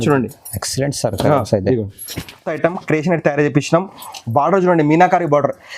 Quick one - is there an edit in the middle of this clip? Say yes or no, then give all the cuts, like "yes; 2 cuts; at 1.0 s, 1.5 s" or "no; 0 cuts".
yes; 1 cut; at 2.5 s